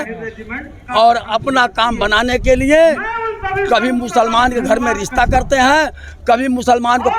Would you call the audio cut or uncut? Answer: uncut